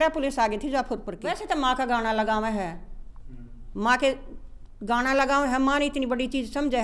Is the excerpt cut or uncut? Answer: cut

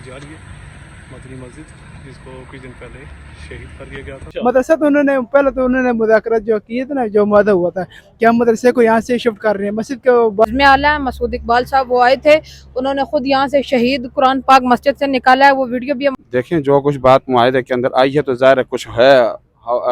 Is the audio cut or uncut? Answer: cut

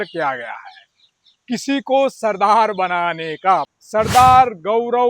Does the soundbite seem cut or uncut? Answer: cut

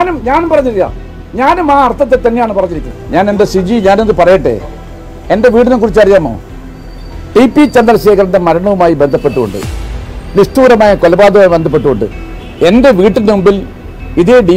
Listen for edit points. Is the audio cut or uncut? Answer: cut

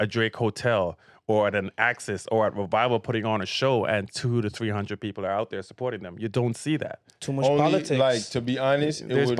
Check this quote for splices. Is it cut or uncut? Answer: uncut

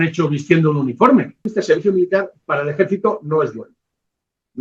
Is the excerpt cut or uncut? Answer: cut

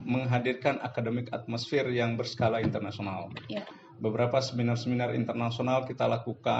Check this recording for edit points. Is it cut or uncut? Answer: uncut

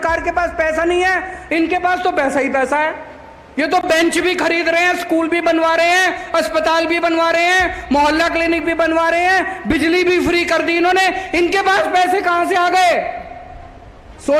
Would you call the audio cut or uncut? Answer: uncut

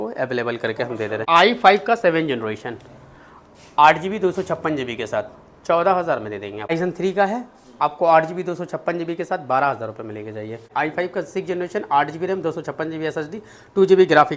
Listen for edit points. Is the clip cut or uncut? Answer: cut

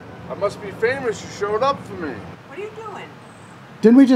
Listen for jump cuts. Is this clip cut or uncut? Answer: cut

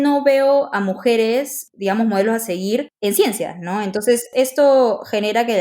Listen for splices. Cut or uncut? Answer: cut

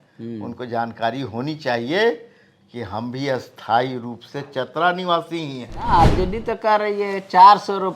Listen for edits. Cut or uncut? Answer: cut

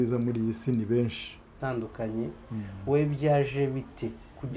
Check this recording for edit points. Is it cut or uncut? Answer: cut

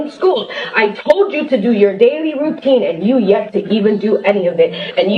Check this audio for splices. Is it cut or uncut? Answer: cut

